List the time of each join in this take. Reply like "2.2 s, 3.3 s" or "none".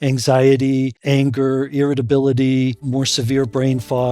1.0 s, 2.8 s